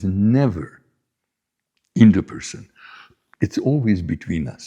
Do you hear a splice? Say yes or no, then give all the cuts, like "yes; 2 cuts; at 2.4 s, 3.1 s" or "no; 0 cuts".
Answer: yes; 1 cut; at 3.2 s